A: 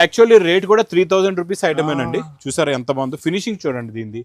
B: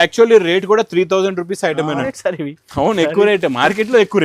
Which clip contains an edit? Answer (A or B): B